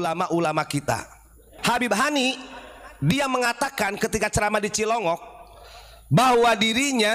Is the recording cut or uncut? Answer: cut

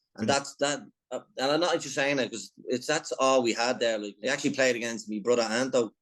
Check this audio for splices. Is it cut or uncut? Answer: cut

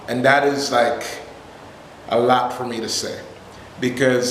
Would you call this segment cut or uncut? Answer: uncut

